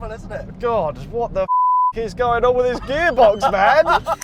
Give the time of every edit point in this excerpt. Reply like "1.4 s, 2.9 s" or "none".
none